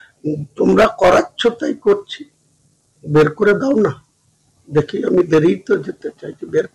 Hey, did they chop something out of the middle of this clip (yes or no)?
no